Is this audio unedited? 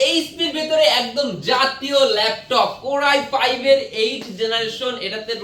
yes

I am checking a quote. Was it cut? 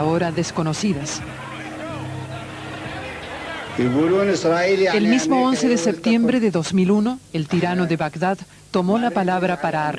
no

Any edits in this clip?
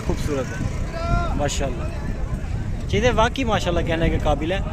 no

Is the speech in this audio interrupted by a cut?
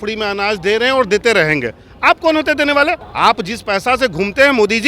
yes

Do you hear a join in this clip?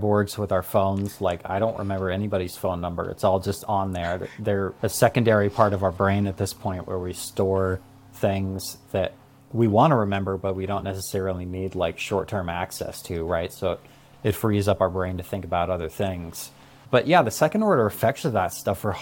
no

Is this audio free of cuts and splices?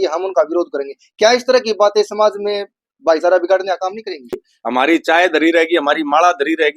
no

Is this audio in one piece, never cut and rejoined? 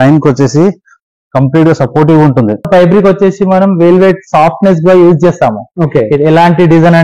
no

